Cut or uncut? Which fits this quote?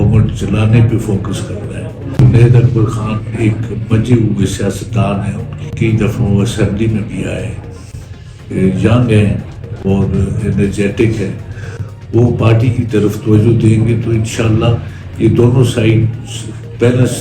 cut